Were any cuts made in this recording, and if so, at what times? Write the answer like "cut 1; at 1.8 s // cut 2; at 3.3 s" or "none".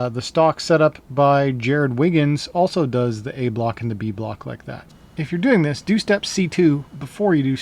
cut 1; at 4.9 s